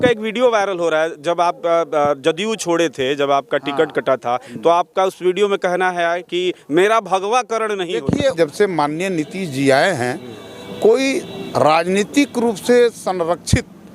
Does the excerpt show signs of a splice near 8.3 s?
yes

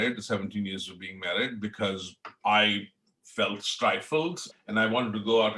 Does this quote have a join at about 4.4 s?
yes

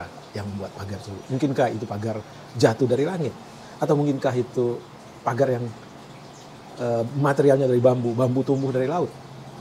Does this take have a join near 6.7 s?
no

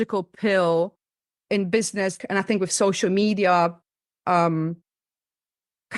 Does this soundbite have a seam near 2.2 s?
yes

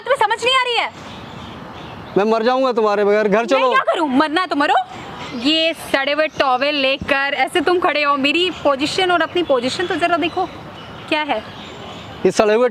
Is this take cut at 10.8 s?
no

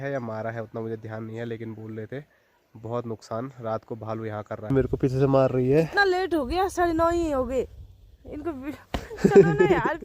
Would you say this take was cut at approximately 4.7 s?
yes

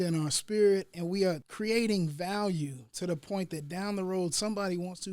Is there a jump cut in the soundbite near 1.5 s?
yes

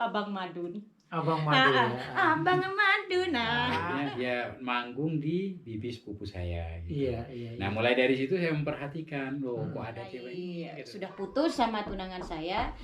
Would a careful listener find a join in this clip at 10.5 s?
yes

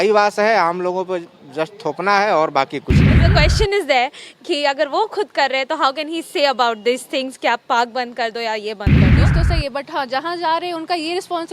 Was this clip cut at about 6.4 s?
no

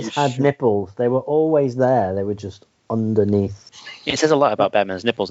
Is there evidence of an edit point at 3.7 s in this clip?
yes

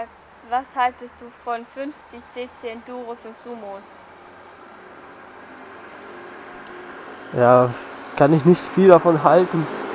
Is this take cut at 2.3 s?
yes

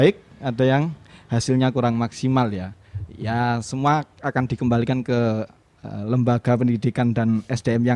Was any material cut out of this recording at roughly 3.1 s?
no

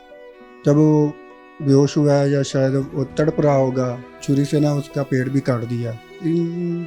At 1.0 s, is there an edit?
no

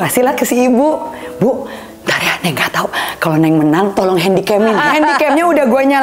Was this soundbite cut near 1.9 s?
no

